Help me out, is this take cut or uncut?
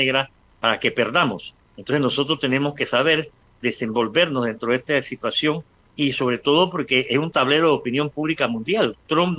cut